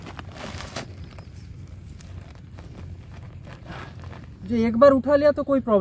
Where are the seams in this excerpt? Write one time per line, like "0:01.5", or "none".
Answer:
none